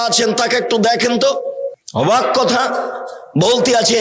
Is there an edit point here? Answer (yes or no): yes